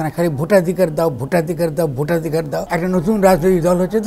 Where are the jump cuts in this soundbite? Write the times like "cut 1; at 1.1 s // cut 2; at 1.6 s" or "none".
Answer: cut 1; at 2.6 s